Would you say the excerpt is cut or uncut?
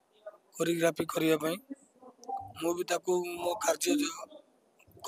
uncut